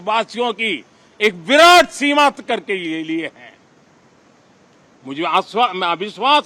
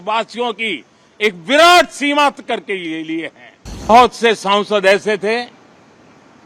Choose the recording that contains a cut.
second; 1 cut; at 3.9 s

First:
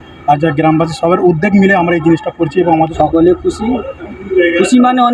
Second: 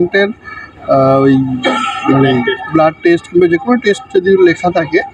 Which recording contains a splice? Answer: first; 1 cut; at 2.9 s

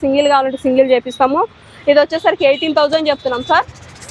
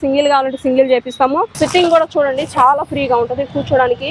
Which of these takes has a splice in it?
second; 1 cut; at 1.5 s

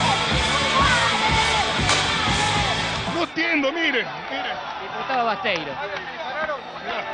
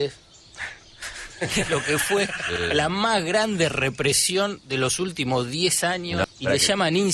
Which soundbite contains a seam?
first; 1 cut; at 3.1 s

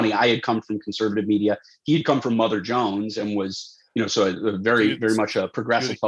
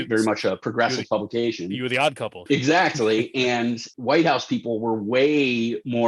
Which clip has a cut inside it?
second; 2 cuts; at 2.3 s, 3.9 s

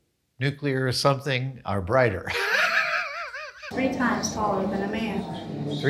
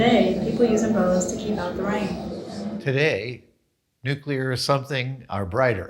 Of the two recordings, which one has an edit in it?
first; 1 cut; at 3.3 s

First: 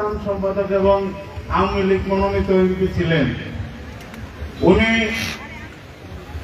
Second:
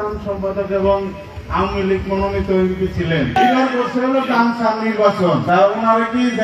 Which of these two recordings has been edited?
second; 2 cuts; at 3.4 s, 5.4 s

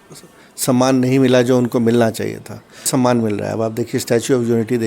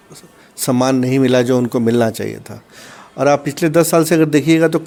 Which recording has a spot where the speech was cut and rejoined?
first; 1 cut; at 2.9 s

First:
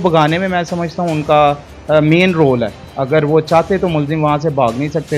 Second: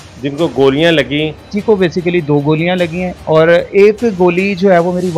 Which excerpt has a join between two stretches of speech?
second; 2 cuts; at 1.5 s, 3.2 s

